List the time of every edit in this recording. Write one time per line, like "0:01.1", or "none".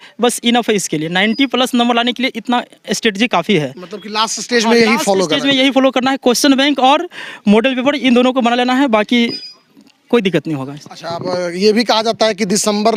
none